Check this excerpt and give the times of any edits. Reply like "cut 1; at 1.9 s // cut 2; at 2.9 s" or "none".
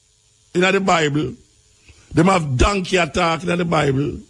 none